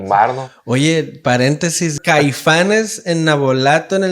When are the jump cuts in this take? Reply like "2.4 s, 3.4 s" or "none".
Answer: 2.0 s